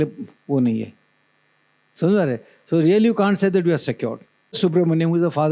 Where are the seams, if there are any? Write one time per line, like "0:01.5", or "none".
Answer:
0:04.6